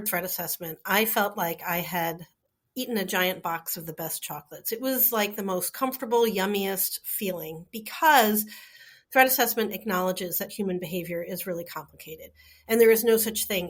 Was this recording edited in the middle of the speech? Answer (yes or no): no